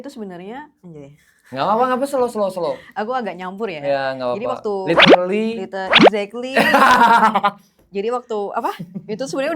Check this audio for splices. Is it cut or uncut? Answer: uncut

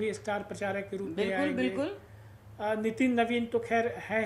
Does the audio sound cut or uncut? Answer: uncut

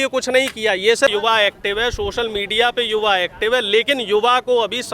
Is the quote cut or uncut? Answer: cut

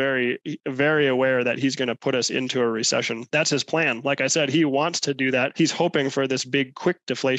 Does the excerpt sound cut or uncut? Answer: uncut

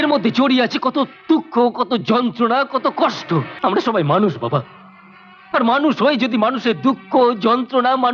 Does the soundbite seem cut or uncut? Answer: cut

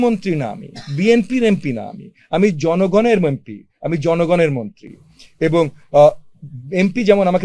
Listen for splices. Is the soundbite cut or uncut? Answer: uncut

